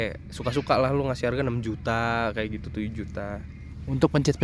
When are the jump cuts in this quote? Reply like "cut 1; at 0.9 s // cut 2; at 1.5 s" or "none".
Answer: none